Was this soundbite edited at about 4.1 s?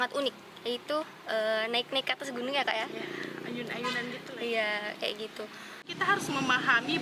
no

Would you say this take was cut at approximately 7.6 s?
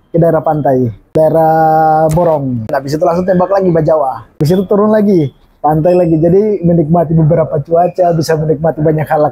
no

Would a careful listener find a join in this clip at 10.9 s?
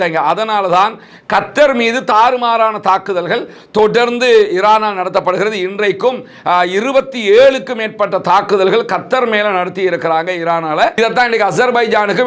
yes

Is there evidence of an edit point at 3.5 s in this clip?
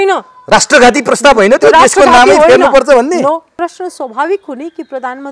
yes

